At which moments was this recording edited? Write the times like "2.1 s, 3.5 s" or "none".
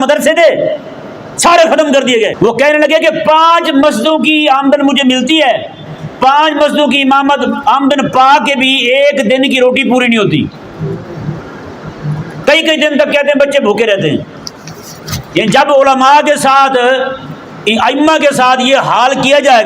2.3 s

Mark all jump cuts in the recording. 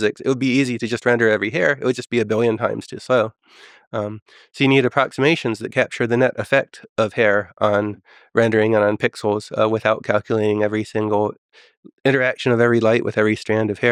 none

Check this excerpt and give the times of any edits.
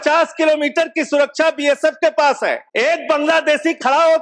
2.6 s

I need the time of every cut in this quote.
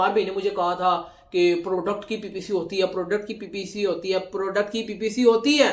none

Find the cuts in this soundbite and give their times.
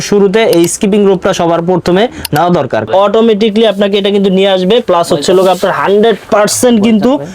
2.9 s

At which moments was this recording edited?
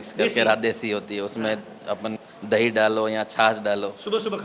2.1 s

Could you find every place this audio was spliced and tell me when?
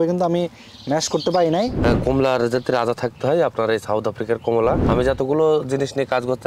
1.8 s, 4.8 s

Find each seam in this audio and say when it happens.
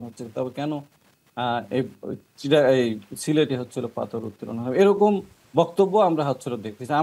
none

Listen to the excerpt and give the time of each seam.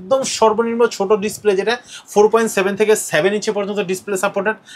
none

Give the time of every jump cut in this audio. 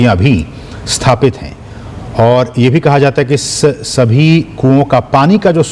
1.2 s

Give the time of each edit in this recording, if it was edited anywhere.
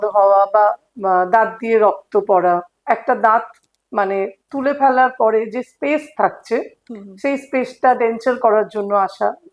2.8 s

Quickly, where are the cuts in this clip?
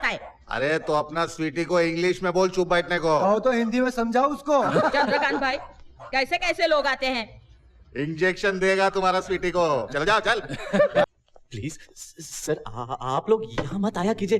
11.1 s

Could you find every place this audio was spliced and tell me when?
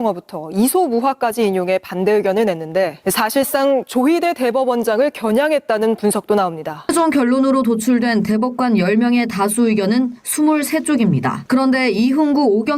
3.0 s, 6.9 s, 11.4 s

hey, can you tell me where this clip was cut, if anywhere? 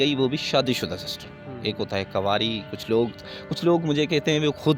none

